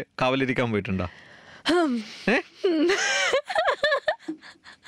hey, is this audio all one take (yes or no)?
yes